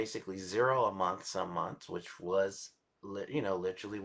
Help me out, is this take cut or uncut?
uncut